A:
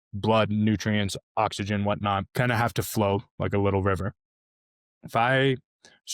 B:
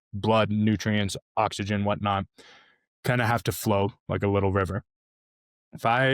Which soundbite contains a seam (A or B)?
A